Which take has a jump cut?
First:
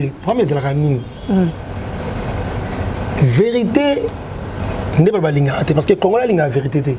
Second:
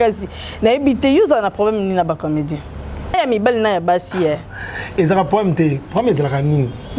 second; 1 cut; at 3.1 s

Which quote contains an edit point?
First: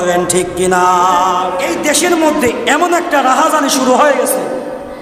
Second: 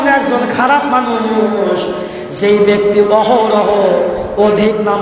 first; 1 cut; at 1.8 s

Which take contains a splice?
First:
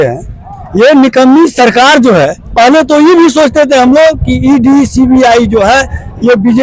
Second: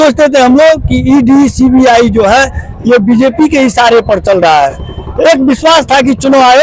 first; 1 cut; at 2.4 s

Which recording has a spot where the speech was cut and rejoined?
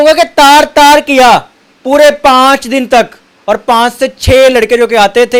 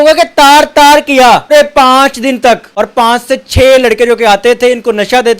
second; 2 cuts; at 1.5 s, 2.7 s

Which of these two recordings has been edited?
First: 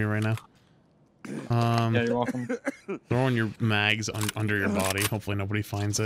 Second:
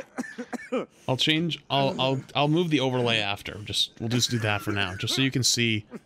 second; 1 cut; at 0.9 s

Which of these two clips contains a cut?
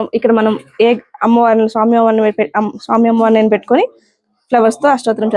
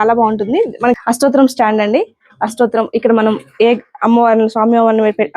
second; 1 cut; at 1.0 s

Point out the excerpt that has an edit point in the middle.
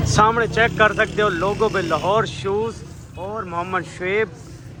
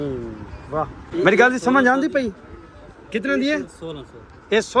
second; 1 cut; at 1.0 s

